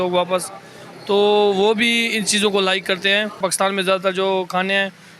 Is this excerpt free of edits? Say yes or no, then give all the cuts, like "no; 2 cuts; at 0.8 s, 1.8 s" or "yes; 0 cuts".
no; 1 cut; at 3.4 s